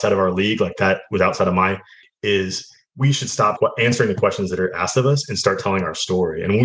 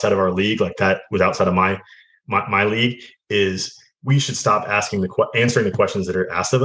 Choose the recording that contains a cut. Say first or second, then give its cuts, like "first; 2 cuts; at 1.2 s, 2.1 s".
first; 2 cuts; at 2.0 s, 3.6 s